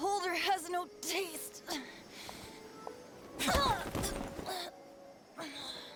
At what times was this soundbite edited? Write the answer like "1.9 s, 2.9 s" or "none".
none